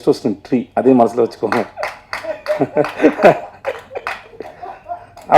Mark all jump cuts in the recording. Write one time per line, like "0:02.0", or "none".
none

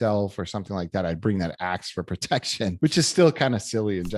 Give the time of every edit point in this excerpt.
0:02.8

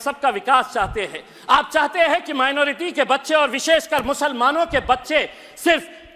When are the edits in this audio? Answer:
none

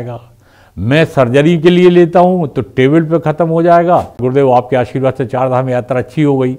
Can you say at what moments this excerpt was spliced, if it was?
0:04.2

